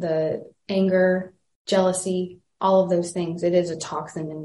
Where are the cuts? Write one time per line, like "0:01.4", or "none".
none